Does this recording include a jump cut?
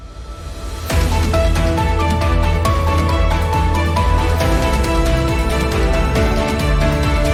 no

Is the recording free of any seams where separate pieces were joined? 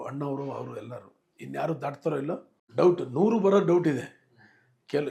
no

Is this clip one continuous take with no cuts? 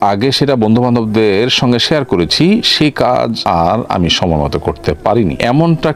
yes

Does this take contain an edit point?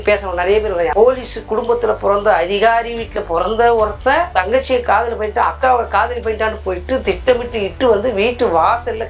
yes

